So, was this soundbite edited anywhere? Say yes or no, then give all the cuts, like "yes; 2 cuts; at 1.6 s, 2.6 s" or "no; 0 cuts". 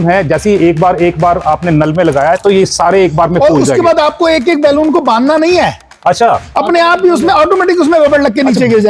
no; 0 cuts